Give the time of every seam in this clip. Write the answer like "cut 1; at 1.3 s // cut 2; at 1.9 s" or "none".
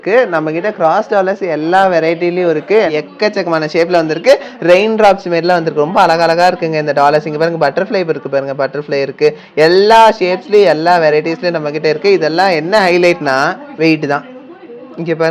cut 1; at 2.9 s